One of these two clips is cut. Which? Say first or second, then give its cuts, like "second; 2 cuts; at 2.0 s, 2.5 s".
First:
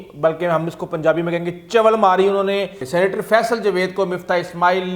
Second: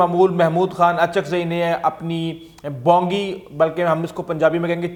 first; 1 cut; at 2.8 s